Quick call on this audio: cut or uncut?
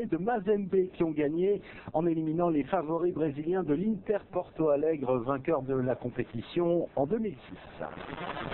uncut